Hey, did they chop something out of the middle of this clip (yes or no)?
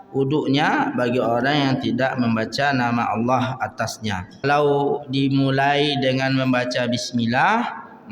yes